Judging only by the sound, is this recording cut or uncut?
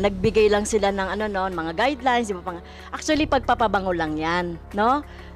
uncut